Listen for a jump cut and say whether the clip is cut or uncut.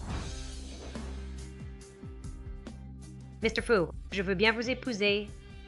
uncut